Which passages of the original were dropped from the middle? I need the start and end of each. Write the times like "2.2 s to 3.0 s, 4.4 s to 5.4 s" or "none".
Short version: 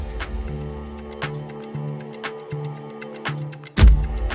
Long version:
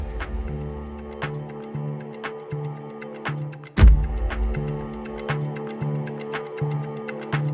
none